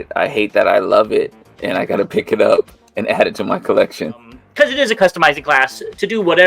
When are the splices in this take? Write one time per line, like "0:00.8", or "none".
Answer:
0:04.4